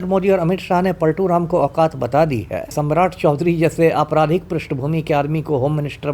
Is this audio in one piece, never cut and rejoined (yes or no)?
no